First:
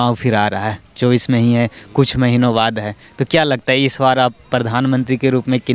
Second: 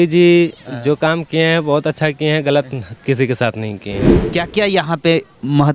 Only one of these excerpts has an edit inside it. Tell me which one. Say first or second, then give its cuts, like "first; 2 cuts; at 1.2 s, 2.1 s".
second; 1 cut; at 4.0 s